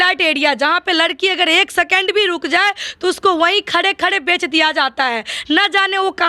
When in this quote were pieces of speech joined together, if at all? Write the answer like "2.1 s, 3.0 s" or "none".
none